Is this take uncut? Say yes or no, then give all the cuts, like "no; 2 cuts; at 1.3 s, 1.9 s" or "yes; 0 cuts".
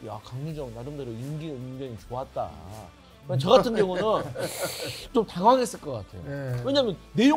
yes; 0 cuts